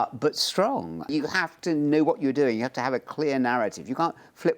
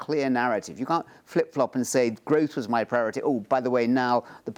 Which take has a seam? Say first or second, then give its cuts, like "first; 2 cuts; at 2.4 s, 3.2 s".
first; 1 cut; at 1.1 s